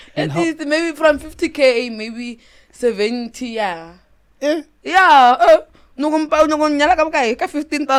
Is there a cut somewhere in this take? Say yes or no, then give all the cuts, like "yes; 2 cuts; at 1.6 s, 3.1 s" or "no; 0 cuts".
no; 0 cuts